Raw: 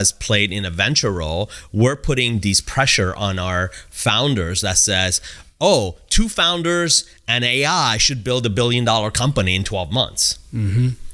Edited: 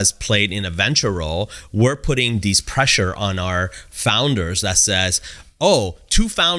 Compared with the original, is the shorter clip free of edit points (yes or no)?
yes